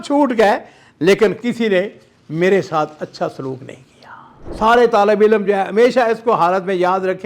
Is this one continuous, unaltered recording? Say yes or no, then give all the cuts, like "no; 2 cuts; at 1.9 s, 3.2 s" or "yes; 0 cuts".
no; 1 cut; at 4.4 s